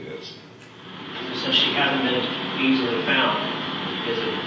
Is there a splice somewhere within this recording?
yes; 1 cut; at 1.0 s

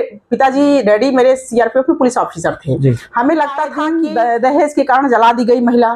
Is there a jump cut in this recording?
yes; 1 cut; at 3.8 s

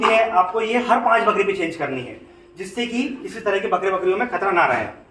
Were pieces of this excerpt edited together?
no; 0 cuts

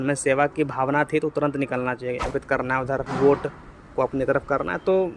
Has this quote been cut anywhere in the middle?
yes; 1 cut; at 2.3 s

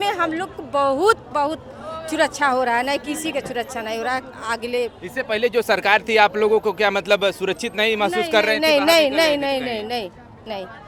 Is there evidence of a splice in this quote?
no; 0 cuts

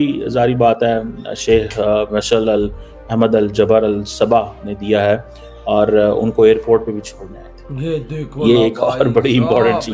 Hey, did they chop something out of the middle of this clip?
no; 0 cuts

